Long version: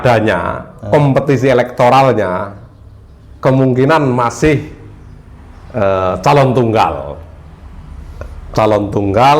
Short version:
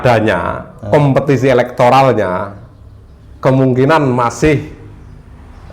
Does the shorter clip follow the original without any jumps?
yes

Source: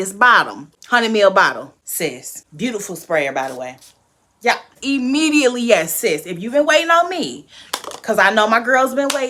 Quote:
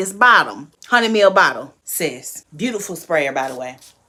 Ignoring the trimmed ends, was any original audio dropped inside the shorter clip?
no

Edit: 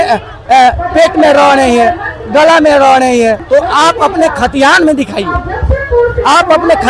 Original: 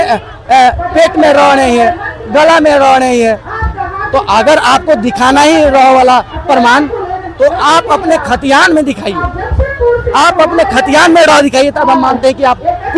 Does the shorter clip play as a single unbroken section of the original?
no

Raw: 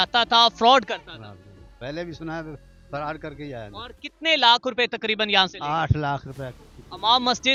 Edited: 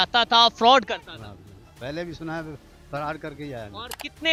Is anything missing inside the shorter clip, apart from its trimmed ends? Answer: no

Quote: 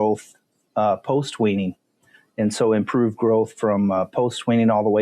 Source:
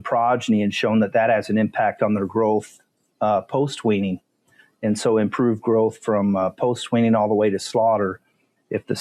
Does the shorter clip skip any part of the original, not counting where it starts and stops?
no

